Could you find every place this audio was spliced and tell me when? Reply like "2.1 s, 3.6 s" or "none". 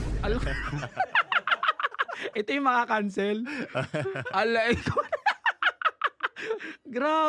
none